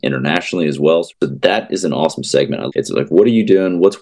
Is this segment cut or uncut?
cut